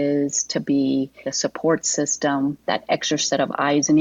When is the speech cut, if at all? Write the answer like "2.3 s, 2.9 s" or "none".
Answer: 2.6 s